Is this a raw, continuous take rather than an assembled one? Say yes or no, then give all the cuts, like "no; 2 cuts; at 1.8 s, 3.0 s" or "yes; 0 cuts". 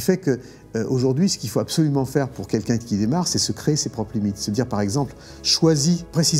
yes; 0 cuts